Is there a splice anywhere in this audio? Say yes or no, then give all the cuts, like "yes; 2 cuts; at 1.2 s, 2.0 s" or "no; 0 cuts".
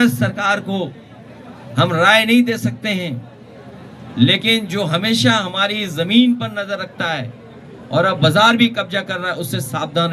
no; 0 cuts